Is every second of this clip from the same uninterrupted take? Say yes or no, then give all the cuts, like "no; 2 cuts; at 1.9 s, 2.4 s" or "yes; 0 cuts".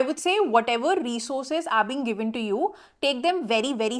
yes; 0 cuts